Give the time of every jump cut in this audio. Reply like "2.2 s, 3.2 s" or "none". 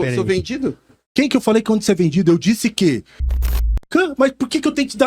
3.4 s